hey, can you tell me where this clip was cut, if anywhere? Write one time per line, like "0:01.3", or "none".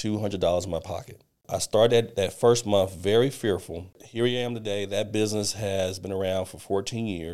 0:01.5
0:04.0